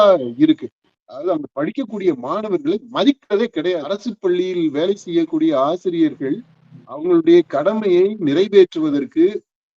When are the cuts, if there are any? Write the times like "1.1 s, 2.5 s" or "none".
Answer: 3.9 s